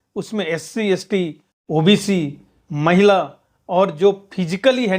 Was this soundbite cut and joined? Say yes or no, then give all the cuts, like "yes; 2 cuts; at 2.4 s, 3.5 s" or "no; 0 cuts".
no; 0 cuts